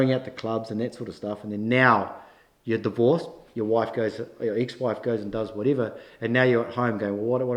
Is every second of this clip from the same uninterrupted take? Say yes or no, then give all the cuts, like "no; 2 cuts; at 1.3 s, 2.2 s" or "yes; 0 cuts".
yes; 0 cuts